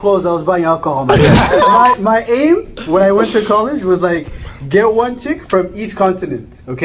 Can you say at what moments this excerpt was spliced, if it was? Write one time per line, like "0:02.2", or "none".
0:01.4